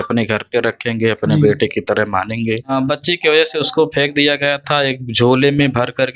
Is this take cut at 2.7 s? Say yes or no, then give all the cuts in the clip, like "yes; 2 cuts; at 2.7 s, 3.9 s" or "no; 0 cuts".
yes; 1 cut; at 2.7 s